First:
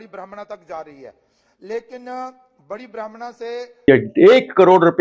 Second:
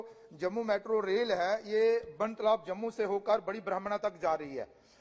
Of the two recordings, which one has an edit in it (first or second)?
first